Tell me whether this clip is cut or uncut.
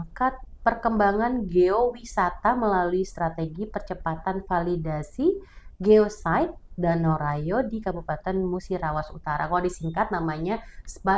uncut